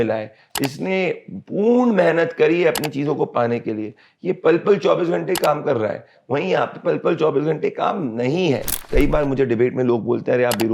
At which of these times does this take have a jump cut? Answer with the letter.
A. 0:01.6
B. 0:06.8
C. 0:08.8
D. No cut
C